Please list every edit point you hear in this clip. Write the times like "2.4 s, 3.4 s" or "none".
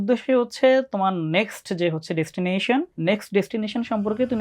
2.9 s